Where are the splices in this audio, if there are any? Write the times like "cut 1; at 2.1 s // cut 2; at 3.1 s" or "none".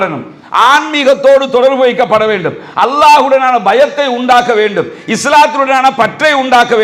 none

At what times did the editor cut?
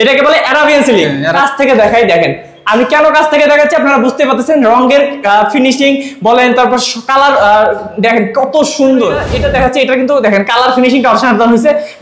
cut 1; at 1.3 s // cut 2; at 9.3 s

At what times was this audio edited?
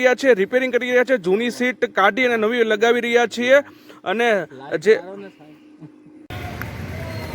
cut 1; at 6.3 s

